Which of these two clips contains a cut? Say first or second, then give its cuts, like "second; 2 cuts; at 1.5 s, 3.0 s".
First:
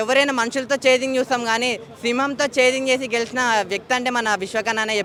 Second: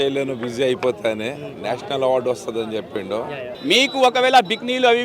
second; 1 cut; at 3.4 s